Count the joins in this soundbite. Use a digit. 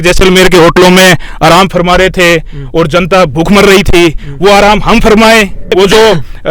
1